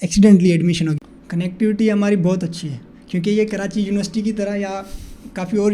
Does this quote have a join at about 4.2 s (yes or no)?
no